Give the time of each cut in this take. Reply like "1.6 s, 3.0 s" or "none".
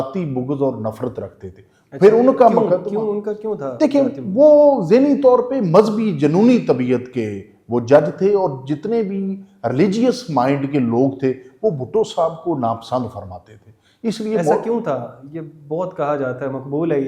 none